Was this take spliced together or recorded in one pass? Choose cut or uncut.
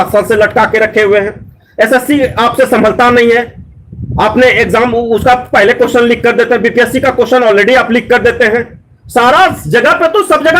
uncut